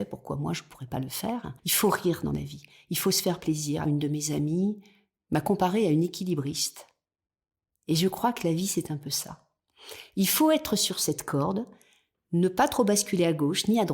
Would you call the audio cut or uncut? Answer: cut